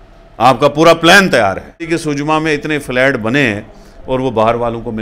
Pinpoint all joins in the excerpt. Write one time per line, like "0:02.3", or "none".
0:01.9